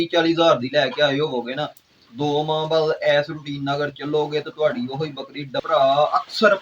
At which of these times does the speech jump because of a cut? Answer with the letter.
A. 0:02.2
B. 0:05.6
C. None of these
B